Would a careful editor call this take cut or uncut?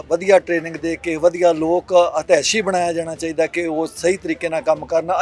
uncut